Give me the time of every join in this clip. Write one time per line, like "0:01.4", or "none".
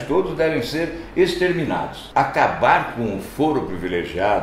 0:02.0